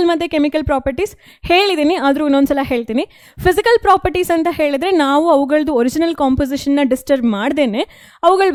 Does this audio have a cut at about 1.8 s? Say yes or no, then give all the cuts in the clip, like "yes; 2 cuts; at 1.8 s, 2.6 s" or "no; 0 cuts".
no; 0 cuts